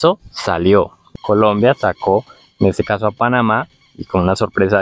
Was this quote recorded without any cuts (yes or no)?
no